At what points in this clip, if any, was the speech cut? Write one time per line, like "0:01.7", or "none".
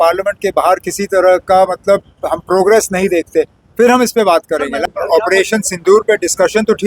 0:04.8